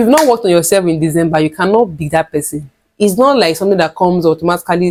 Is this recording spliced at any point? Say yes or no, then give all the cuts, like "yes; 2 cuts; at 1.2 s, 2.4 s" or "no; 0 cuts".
no; 0 cuts